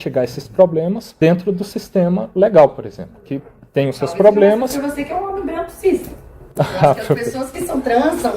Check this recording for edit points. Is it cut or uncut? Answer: cut